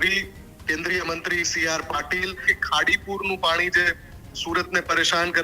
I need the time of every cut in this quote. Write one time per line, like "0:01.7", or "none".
0:02.5